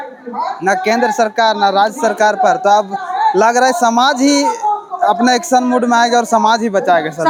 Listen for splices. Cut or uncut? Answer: uncut